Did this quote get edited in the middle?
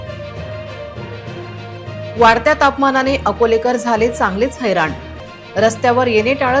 yes; 1 cut; at 0.9 s

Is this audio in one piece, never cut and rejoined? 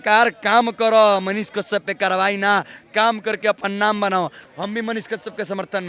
no; 1 cut; at 4.4 s

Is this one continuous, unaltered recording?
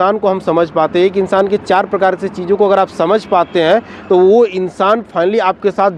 yes; 0 cuts

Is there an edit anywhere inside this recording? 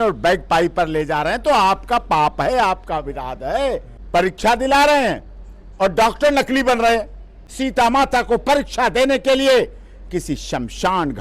yes; 2 cuts; at 3.9 s, 7.4 s

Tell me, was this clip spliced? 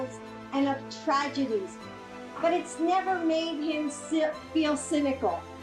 no; 0 cuts

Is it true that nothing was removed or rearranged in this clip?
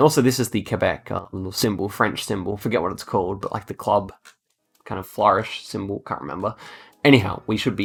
yes; 0 cuts

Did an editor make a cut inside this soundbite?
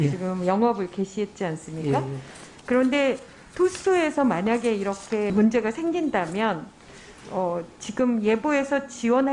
no; 0 cuts

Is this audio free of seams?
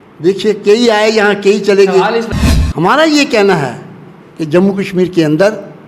no; 1 cut; at 2.3 s

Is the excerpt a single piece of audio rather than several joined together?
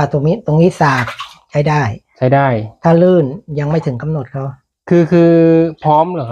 yes; 0 cuts

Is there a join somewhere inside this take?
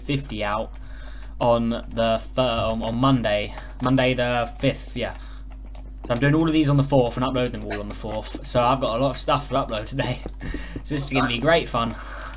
no; 0 cuts

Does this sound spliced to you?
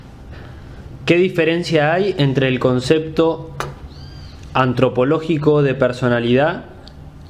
no; 0 cuts

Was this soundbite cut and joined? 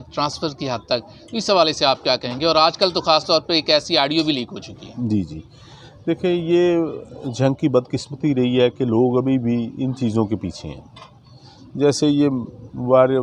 no; 0 cuts

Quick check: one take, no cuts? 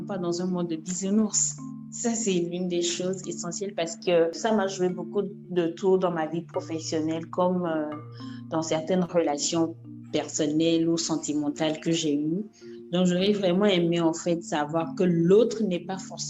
no; 1 cut; at 4.4 s

